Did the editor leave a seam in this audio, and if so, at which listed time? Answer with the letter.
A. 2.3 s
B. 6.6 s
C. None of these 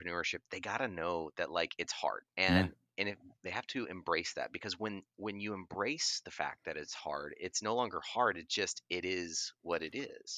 A